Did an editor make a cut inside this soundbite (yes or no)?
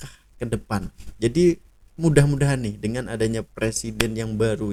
no